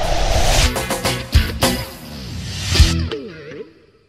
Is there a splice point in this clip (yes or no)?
no